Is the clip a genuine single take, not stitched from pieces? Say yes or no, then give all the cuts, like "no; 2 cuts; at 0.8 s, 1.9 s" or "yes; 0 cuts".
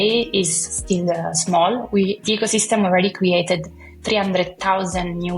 no; 1 cut; at 2.2 s